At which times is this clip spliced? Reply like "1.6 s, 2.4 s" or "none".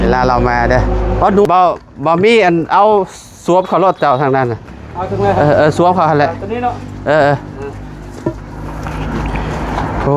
1.4 s